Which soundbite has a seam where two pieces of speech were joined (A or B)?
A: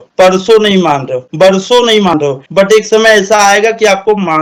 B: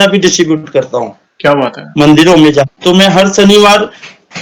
B